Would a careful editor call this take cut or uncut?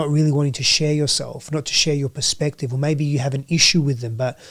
uncut